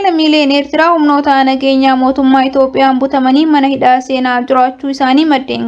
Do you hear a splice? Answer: no; 0 cuts

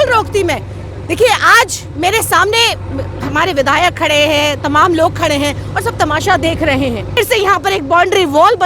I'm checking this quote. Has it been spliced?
yes; 1 cut; at 7.2 s

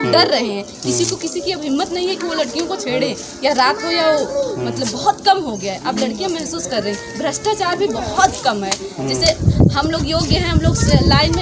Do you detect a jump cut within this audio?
no; 0 cuts

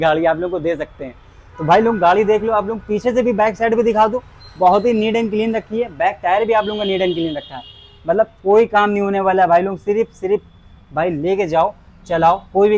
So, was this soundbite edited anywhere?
no; 0 cuts

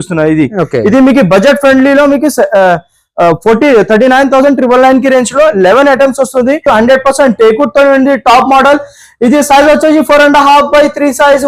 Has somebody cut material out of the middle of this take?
yes; 1 cut; at 6.6 s

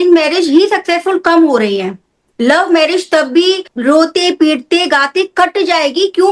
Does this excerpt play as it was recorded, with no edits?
yes; 0 cuts

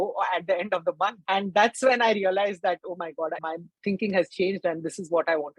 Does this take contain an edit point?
yes; 2 cuts; at 1.2 s, 3.4 s

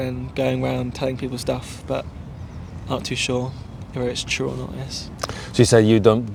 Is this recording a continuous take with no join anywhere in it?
yes; 0 cuts

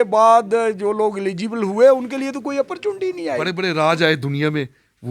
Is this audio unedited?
no; 1 cut; at 3.5 s

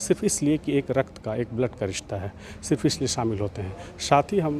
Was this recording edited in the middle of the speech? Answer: no; 0 cuts

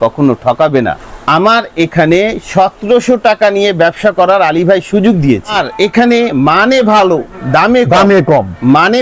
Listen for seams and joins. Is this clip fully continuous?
no; 2 cuts; at 1.1 s, 5.6 s

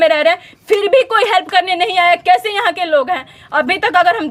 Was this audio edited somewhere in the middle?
no; 0 cuts

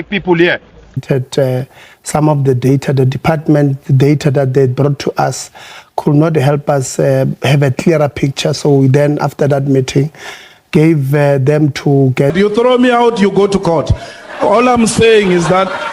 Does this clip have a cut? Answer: yes; 2 cuts; at 1.0 s, 12.3 s

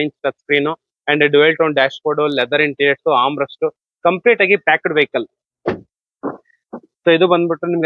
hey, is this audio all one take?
yes; 0 cuts

